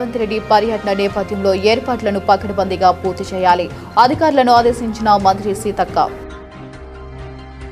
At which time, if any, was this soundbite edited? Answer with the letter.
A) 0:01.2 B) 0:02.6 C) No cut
C